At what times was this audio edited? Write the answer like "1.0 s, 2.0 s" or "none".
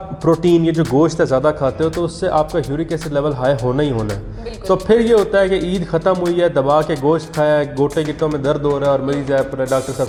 none